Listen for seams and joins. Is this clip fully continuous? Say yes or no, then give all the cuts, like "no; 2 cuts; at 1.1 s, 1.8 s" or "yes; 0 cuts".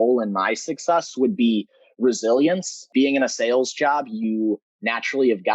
no; 1 cut; at 2.8 s